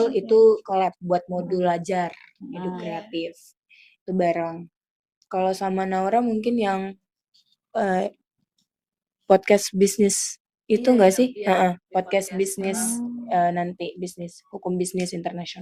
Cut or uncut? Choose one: uncut